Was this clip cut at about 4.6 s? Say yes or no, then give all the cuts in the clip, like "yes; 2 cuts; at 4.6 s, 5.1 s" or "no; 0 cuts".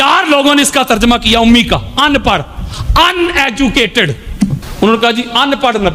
yes; 1 cut; at 4.6 s